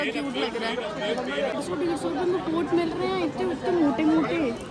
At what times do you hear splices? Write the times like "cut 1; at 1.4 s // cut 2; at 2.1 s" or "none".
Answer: cut 1; at 1.5 s